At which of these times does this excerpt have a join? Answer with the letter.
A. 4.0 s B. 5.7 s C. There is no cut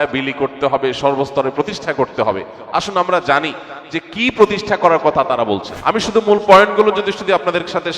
B